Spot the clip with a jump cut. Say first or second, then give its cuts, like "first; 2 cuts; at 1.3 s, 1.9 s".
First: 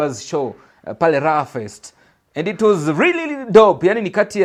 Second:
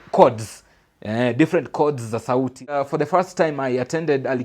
second; 1 cut; at 2.8 s